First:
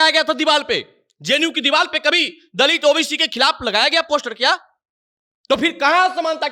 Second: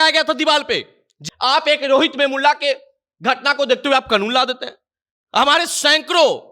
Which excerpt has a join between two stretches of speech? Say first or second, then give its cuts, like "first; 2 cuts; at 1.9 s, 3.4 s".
second; 1 cut; at 1.1 s